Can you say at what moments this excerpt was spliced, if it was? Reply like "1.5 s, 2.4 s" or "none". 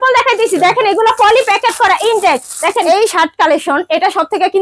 2.8 s